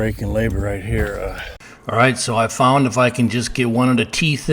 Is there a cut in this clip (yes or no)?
yes